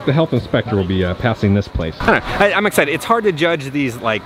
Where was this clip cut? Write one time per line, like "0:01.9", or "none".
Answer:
none